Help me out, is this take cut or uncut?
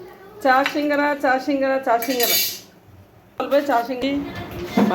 cut